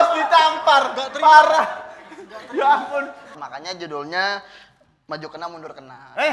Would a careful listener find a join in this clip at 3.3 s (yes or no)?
yes